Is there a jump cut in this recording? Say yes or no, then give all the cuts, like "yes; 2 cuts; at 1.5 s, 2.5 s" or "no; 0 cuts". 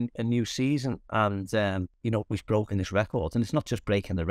yes; 1 cut; at 1.9 s